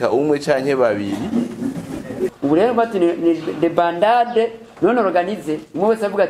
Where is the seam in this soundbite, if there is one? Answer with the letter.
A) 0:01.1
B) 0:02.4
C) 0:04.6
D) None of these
B